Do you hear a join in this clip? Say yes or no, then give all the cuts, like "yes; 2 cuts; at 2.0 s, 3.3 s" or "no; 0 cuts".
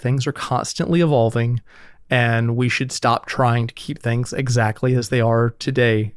no; 0 cuts